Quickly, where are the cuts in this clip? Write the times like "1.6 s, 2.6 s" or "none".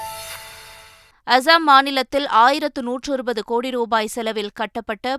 0.9 s